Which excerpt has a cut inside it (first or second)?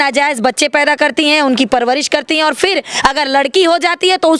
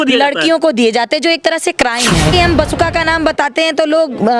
second